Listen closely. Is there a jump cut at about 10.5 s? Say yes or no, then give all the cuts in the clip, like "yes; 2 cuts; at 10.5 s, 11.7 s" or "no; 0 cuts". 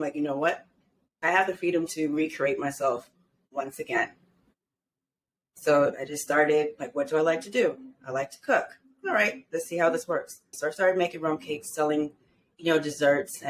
yes; 1 cut; at 10.5 s